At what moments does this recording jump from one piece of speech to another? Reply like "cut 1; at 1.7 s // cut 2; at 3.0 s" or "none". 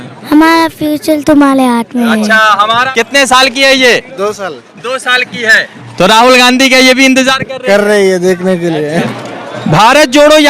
cut 1; at 2.9 s // cut 2; at 9.0 s